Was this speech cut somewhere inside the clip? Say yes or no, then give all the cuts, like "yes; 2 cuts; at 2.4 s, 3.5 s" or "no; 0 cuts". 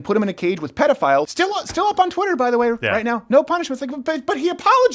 yes; 1 cut; at 1.3 s